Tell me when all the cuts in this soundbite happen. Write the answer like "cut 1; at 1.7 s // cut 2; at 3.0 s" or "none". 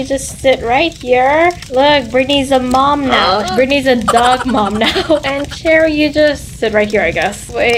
none